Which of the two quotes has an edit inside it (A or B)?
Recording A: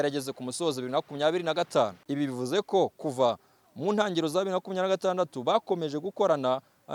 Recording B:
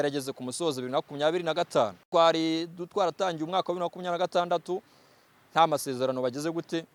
A